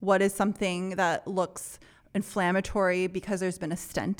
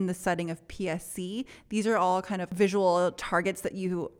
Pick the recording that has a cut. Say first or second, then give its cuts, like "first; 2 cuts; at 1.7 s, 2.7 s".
second; 1 cut; at 2.5 s